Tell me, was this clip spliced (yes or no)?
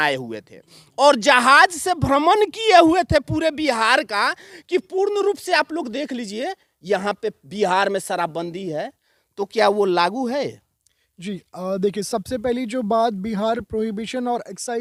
no